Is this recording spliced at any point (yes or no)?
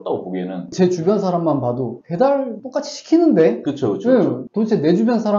yes